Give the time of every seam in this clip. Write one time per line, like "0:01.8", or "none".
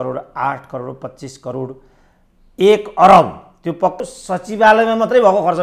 0:04.0